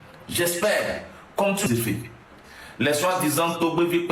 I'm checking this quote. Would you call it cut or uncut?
cut